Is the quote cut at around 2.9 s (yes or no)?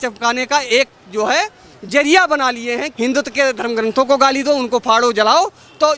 yes